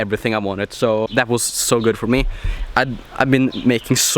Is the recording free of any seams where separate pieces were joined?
no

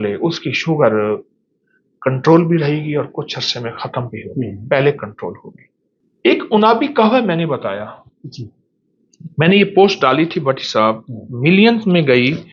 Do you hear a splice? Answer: no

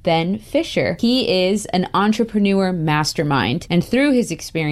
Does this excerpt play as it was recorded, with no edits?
no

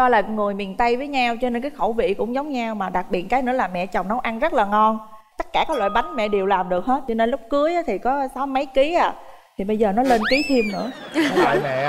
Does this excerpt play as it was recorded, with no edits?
yes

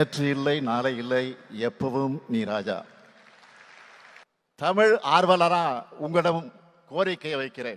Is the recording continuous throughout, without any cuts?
no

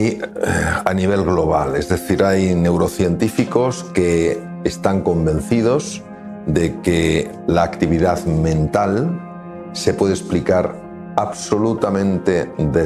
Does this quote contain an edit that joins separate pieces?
no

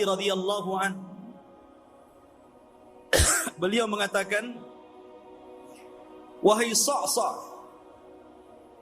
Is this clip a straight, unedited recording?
no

